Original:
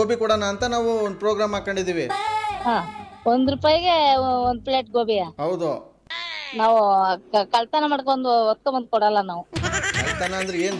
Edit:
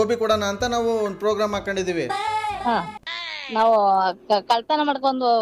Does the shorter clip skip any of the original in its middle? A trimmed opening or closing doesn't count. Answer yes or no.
yes